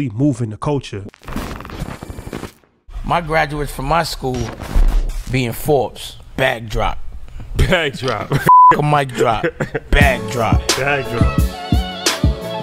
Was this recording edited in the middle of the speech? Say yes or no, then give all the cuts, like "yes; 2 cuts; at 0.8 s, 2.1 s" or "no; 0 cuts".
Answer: yes; 1 cut; at 1.0 s